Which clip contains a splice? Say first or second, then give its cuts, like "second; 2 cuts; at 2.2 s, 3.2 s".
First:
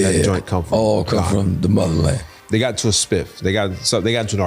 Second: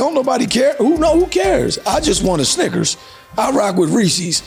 first; 1 cut; at 2.3 s